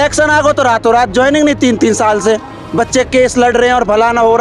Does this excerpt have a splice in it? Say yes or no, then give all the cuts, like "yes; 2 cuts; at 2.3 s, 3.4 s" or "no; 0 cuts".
no; 0 cuts